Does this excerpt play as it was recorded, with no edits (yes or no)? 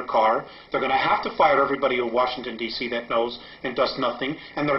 no